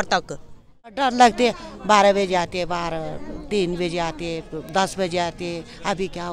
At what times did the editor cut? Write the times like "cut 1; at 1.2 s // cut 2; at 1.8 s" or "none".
cut 1; at 0.9 s